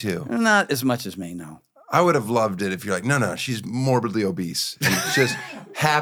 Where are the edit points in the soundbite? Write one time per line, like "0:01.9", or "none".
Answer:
none